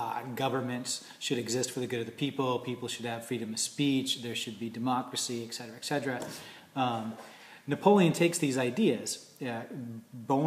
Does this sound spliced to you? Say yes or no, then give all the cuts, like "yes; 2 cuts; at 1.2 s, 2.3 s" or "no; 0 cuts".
yes; 1 cut; at 8.6 s